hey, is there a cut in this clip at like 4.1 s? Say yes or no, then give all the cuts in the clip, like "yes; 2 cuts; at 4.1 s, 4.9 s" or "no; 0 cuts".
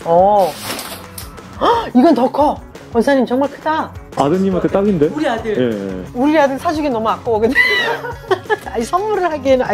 yes; 1 cut; at 4.1 s